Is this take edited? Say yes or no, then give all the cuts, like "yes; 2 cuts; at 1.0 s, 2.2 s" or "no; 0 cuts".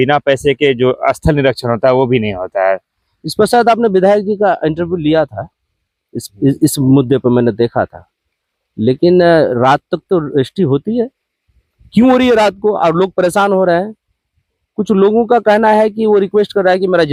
no; 0 cuts